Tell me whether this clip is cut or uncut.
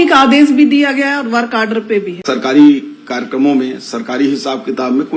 cut